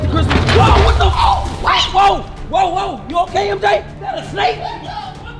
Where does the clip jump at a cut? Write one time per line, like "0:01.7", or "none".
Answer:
0:03.9

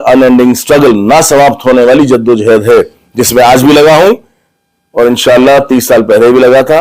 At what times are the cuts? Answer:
none

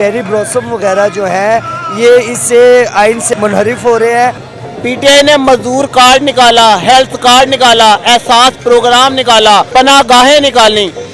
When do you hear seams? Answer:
0:03.3
0:04.4
0:09.7

